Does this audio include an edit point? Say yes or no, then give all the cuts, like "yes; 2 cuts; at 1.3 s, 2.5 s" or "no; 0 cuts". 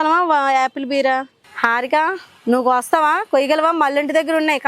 yes; 1 cut; at 1.4 s